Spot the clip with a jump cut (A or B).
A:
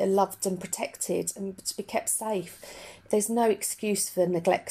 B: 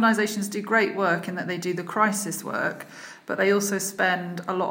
A